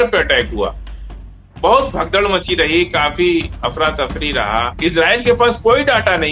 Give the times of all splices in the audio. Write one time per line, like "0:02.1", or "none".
0:04.7